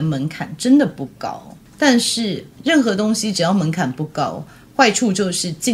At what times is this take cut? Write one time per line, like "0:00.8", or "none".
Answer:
none